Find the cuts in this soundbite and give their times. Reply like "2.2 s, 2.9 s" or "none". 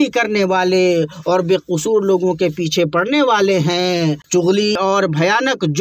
4.6 s